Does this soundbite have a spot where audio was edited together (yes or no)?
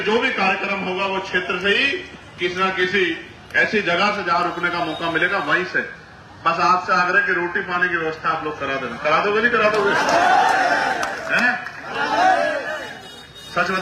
no